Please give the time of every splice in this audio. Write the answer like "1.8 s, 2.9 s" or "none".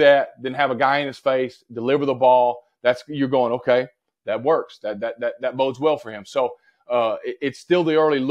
none